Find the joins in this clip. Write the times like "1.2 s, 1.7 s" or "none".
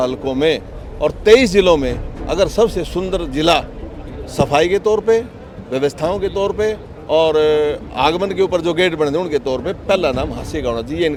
none